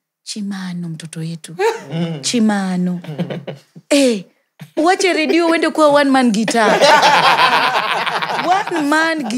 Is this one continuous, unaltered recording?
yes; 0 cuts

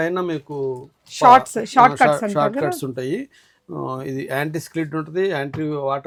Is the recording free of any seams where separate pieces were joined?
yes; 0 cuts

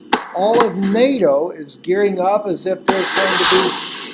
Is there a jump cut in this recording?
yes; 1 cut; at 2.6 s

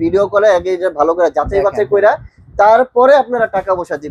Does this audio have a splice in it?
no; 0 cuts

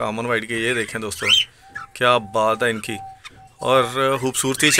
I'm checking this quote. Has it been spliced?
no; 0 cuts

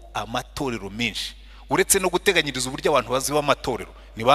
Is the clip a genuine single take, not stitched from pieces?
no; 1 cut; at 3.2 s

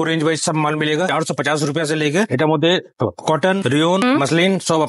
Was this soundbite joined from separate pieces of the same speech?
yes; 1 cut; at 2.3 s

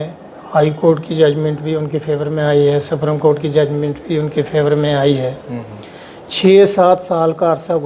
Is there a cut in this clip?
no; 0 cuts

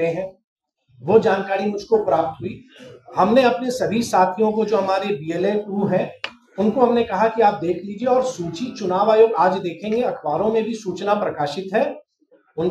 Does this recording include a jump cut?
no; 0 cuts

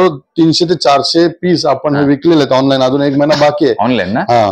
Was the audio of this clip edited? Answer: no; 0 cuts

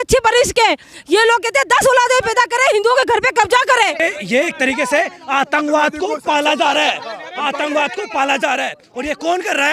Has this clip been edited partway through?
yes; 1 cut; at 4.0 s

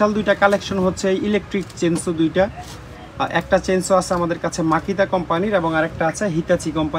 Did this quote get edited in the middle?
no; 0 cuts

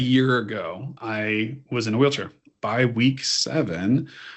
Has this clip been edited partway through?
yes; 2 cuts; at 0.9 s, 2.5 s

